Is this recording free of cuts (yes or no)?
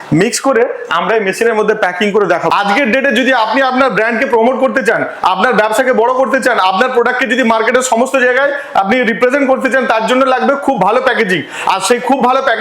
no